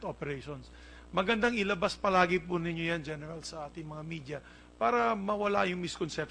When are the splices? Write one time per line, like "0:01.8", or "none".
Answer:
0:04.4